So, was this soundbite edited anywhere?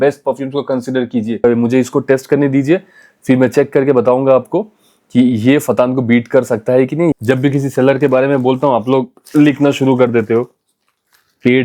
yes; 2 cuts; at 1.4 s, 7.1 s

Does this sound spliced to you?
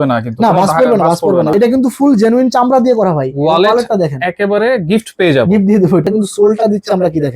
yes; 2 cuts; at 1.5 s, 6.1 s

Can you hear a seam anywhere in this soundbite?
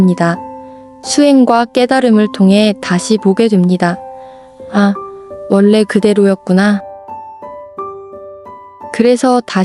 no; 0 cuts

